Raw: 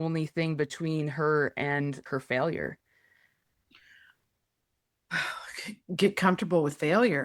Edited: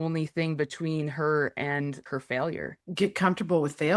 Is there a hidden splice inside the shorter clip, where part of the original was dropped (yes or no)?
yes